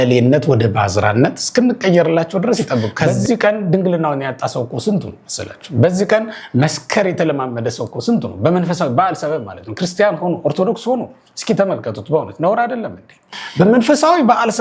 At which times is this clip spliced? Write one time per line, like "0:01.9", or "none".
0:03.0
0:13.4